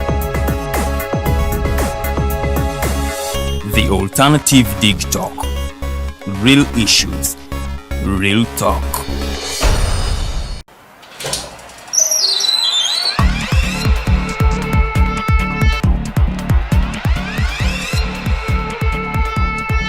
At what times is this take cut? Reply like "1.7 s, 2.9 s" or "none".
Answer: 10.5 s